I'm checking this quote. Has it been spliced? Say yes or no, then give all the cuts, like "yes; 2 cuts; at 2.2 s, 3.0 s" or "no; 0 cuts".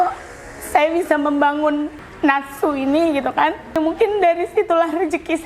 yes; 2 cuts; at 2.0 s, 3.8 s